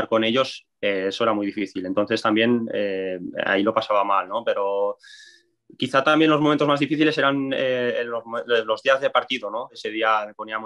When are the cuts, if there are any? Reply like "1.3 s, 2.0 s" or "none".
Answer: 9.8 s